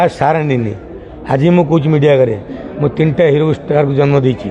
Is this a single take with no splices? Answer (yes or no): yes